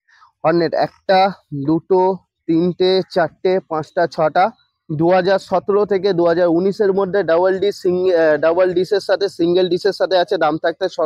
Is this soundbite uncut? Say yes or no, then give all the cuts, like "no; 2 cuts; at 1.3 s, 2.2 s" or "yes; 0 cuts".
yes; 0 cuts